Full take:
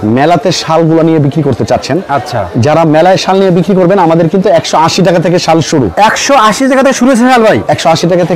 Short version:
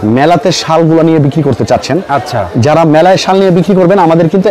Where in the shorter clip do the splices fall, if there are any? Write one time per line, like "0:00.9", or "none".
none